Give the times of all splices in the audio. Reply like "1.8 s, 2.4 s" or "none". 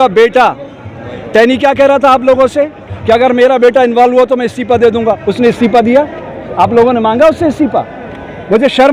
none